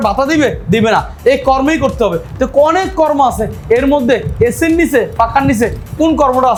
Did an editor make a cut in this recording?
no; 0 cuts

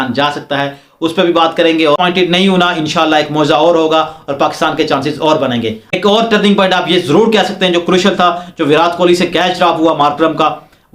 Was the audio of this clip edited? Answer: yes; 2 cuts; at 2.0 s, 6.0 s

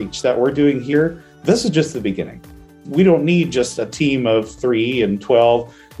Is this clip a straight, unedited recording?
no; 3 cuts; at 0.9 s, 2.8 s, 4.6 s

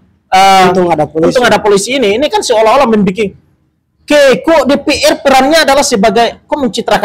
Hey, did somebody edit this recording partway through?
no; 0 cuts

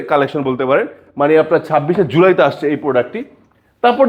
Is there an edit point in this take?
no; 0 cuts

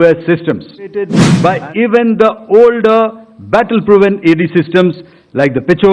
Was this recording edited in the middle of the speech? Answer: yes; 1 cut; at 1.2 s

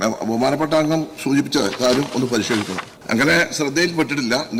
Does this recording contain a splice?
yes; 1 cut; at 2.9 s

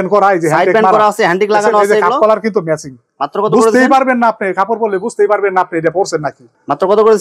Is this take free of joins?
yes; 0 cuts

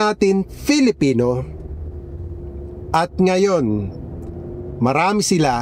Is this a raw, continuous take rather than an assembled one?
yes; 0 cuts

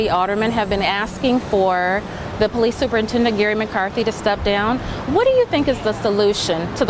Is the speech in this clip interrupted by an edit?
no; 0 cuts

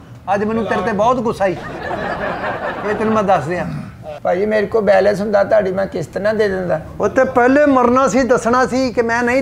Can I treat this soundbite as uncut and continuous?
no; 1 cut; at 4.1 s

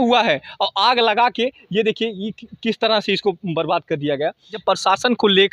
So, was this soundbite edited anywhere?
yes; 1 cut; at 4.6 s

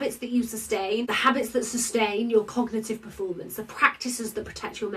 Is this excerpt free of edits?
no; 1 cut; at 1.1 s

